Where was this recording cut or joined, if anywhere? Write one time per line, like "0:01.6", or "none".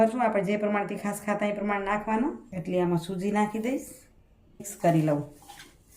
0:02.5
0:04.7